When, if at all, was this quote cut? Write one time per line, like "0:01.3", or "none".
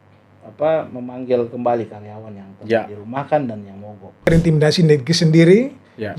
0:04.3